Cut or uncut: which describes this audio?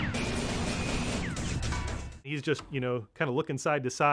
cut